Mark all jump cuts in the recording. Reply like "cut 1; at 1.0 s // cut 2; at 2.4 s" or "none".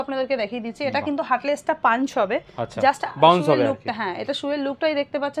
none